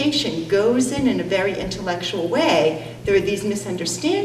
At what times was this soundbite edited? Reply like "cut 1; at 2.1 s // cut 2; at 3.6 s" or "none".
none